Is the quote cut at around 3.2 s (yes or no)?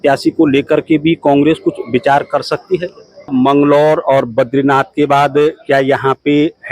yes